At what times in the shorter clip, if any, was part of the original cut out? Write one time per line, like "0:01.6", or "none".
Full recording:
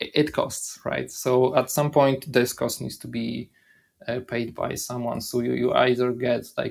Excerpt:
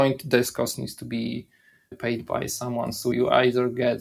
0:02.0
0:03.1